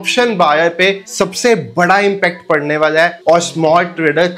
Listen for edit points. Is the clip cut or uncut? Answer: cut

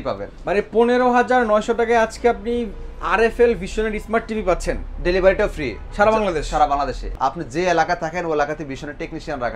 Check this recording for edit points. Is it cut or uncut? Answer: cut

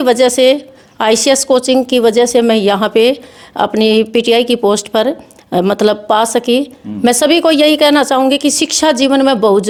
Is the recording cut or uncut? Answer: uncut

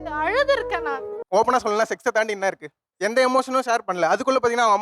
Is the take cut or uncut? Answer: cut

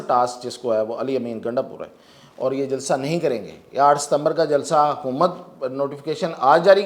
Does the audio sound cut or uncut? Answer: uncut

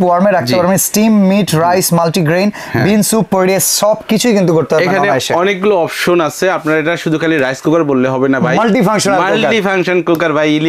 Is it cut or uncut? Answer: uncut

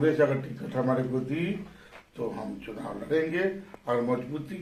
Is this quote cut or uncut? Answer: uncut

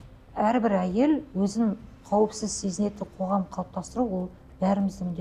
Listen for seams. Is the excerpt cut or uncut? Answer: uncut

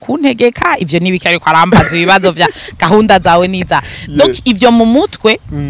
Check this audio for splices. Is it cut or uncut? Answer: uncut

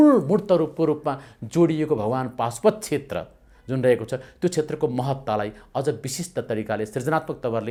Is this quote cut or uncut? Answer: uncut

